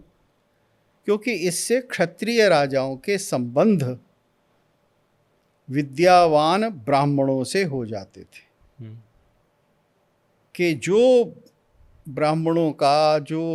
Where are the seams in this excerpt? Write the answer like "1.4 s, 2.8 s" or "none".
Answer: none